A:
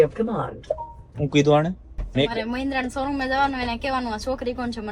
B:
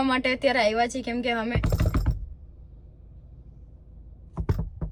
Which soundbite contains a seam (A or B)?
A